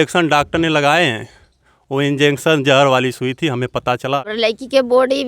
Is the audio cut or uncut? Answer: cut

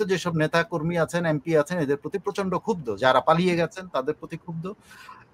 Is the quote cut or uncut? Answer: uncut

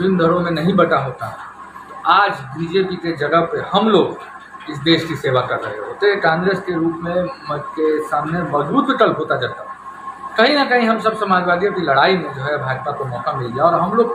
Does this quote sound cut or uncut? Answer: uncut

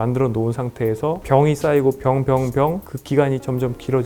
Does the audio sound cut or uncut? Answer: cut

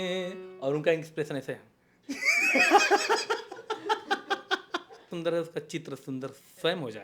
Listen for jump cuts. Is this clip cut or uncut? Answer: cut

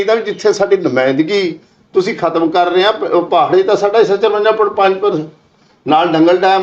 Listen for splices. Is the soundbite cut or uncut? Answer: uncut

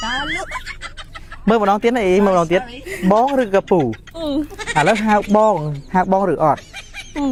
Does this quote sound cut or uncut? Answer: uncut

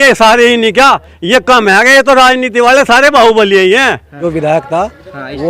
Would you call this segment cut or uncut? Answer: cut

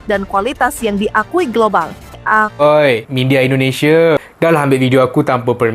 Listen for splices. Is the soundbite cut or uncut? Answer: cut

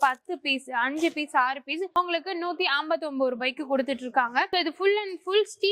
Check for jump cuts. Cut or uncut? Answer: cut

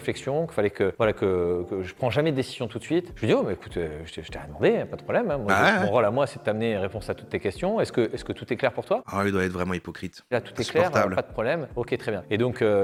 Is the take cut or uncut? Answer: uncut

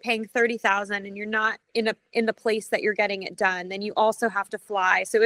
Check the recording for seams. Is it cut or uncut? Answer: uncut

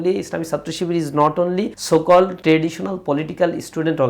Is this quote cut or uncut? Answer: cut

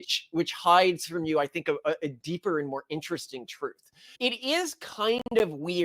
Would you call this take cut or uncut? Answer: cut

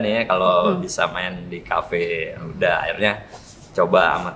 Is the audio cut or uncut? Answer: uncut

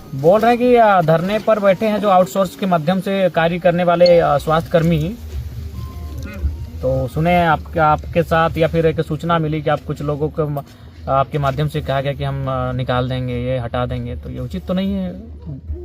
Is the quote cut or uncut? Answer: uncut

